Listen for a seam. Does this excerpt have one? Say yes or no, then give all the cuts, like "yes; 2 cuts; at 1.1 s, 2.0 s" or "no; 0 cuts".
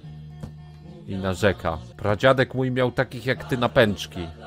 yes; 1 cut; at 1.9 s